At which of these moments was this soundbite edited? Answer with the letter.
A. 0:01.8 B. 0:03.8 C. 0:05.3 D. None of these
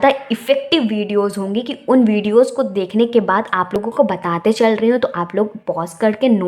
B